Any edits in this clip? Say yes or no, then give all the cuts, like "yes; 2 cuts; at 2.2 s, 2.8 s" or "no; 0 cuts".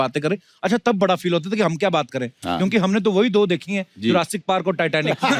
no; 0 cuts